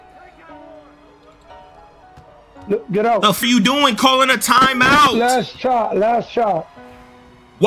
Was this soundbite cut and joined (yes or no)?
yes